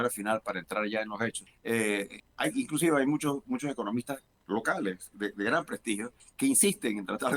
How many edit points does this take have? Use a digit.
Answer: 4